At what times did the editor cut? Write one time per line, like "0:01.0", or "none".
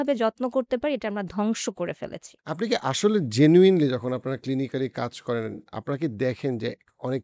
none